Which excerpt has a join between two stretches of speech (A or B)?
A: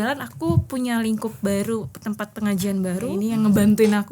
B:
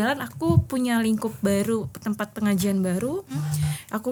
A